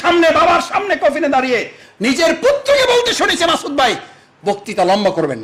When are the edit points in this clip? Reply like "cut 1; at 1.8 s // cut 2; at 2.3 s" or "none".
none